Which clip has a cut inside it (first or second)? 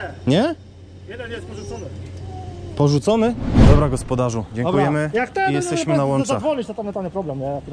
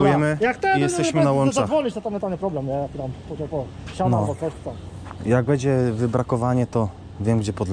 first